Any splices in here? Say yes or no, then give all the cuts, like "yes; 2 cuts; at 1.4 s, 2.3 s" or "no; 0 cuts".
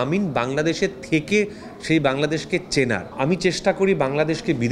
yes; 1 cut; at 3.1 s